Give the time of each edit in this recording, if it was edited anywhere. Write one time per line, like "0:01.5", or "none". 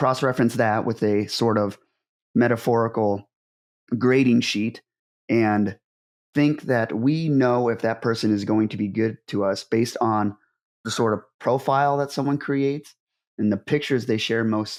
none